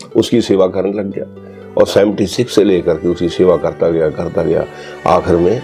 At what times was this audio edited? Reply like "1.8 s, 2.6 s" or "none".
none